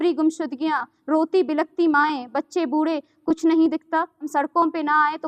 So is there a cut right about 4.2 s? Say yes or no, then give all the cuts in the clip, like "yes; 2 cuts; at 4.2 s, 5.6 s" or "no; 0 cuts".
yes; 1 cut; at 4.2 s